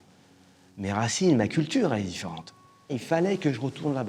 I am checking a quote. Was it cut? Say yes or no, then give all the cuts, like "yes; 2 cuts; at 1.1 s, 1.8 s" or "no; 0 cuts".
yes; 1 cut; at 3.0 s